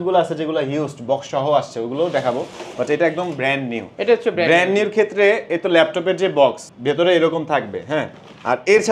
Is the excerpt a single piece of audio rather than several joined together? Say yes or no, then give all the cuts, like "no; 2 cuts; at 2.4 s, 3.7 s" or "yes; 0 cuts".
yes; 0 cuts